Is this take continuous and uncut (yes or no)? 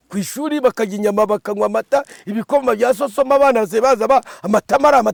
yes